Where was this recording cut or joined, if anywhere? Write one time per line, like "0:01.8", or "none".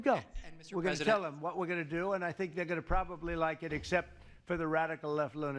none